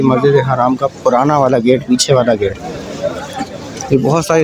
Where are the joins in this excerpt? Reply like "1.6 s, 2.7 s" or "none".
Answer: none